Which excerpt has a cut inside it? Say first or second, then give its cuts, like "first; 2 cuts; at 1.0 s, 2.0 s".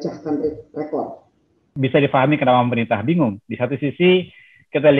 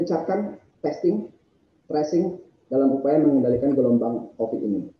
first; 1 cut; at 1.7 s